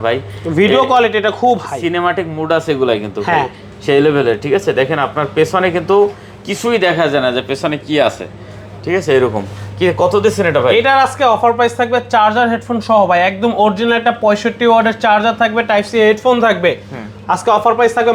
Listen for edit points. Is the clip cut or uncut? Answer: uncut